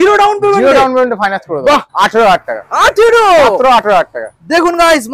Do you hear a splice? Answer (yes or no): yes